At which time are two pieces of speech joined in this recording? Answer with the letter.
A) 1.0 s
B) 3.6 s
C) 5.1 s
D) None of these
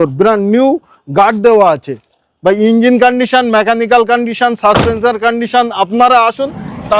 D